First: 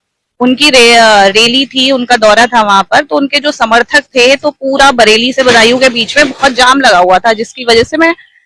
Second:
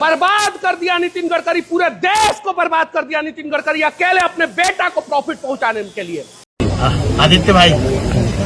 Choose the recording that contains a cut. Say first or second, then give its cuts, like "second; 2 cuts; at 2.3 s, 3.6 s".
second; 1 cut; at 6.5 s